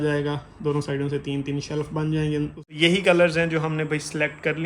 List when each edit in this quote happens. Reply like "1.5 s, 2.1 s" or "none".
2.6 s